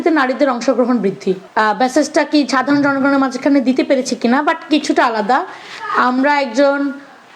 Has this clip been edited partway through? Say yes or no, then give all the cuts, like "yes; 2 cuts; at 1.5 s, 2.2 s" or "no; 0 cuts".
yes; 1 cut; at 1.5 s